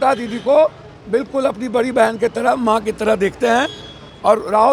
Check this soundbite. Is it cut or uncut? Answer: uncut